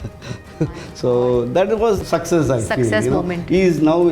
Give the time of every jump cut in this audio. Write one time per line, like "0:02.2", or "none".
0:02.0

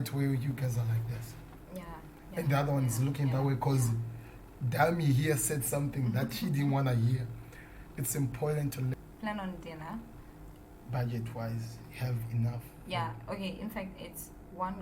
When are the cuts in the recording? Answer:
0:08.9

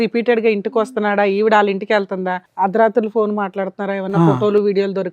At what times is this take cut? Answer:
0:02.4

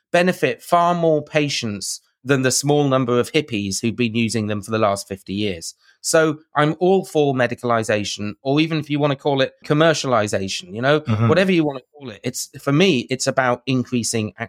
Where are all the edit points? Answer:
0:09.6

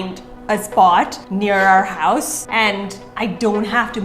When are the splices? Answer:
0:01.2
0:02.4

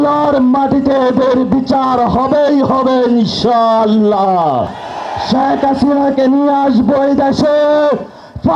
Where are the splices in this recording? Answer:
0:04.8

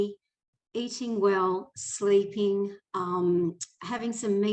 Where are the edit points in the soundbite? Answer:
none

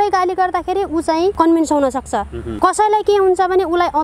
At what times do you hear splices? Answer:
0:01.3
0:02.4

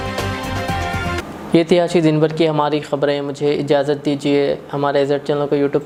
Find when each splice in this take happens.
none

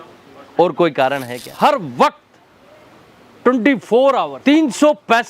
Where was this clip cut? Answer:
0:01.5

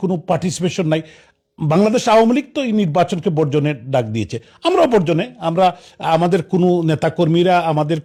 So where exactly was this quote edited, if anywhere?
none

